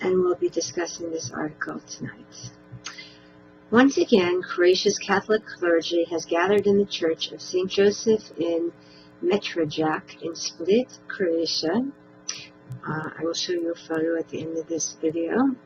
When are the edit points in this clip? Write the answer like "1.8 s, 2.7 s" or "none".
none

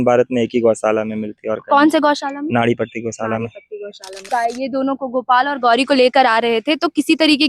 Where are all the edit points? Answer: 4.3 s

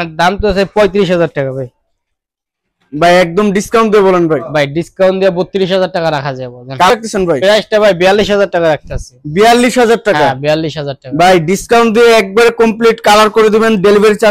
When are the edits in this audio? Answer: 6.9 s

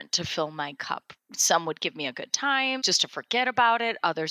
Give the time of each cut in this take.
1.1 s, 2.8 s

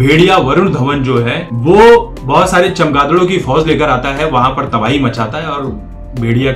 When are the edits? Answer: 1.4 s, 2.2 s

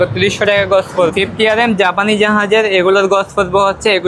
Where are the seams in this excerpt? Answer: 1.1 s

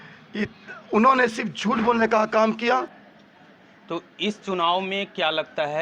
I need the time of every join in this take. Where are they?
3.0 s

